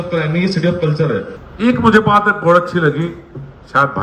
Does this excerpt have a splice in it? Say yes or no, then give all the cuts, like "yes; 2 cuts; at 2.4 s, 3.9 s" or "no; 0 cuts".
yes; 1 cut; at 1.4 s